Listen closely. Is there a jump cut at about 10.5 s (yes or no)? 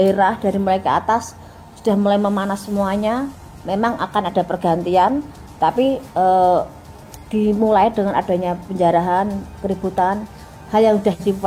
no